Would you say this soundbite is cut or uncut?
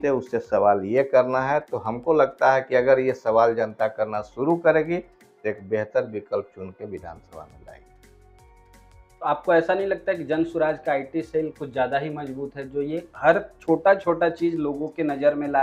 uncut